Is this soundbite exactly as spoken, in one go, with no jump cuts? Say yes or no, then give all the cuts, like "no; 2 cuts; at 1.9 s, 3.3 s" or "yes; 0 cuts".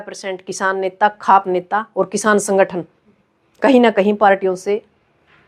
yes; 0 cuts